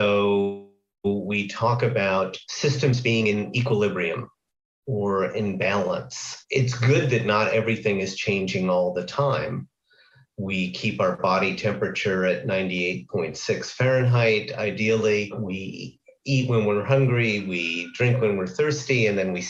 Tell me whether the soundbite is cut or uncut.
uncut